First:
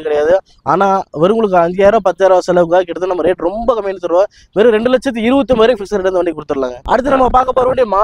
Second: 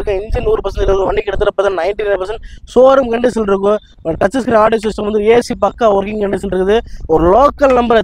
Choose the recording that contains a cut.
first; 1 cut; at 6.8 s

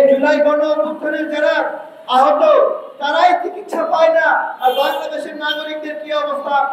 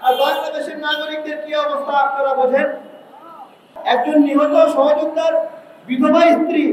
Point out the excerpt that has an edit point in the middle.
second; 1 cut; at 3.8 s

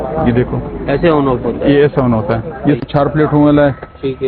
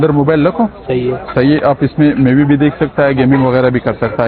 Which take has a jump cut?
first; 1 cut; at 2.8 s

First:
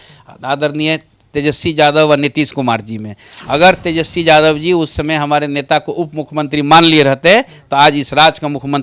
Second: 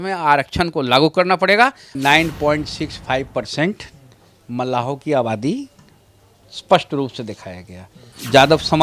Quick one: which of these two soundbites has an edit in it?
second; 1 cut; at 1.9 s

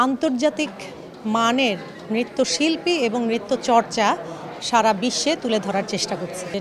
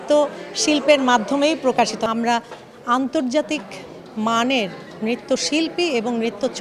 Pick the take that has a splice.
second; 1 cut; at 2.0 s

